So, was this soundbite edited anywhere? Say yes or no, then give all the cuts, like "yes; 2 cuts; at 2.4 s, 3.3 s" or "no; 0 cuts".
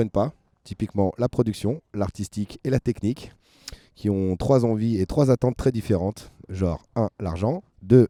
no; 0 cuts